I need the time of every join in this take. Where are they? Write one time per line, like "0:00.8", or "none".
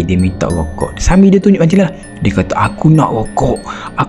none